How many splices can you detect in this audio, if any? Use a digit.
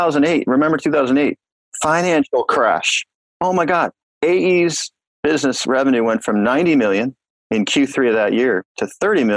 2